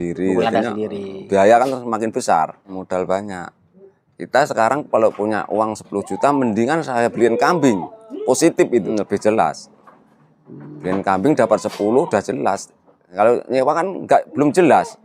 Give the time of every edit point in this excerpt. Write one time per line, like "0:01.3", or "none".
0:02.8
0:08.9
0:13.1